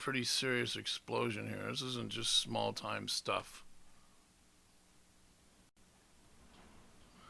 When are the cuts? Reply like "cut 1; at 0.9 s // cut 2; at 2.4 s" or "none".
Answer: none